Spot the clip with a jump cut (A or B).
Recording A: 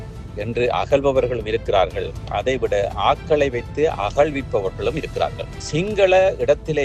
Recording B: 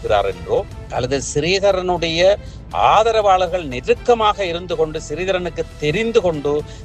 A